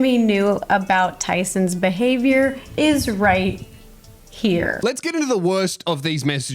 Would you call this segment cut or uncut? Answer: uncut